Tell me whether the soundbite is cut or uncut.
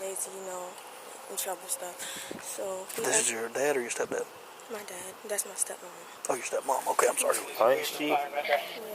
cut